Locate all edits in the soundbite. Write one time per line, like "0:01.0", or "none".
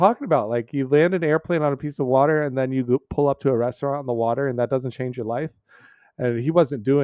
none